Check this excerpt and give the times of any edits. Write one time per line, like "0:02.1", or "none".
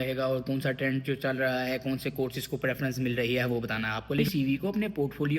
0:04.2